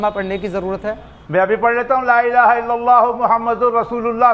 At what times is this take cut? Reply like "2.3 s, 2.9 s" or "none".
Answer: 1.1 s